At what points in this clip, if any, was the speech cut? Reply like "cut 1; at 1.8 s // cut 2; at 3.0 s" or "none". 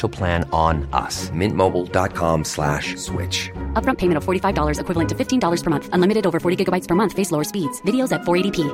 none